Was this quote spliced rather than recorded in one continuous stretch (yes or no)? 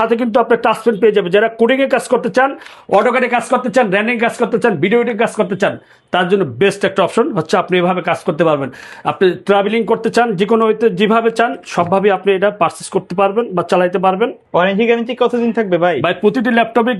no